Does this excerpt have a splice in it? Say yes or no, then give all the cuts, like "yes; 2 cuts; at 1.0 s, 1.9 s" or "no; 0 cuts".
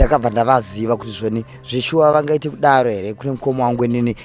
no; 0 cuts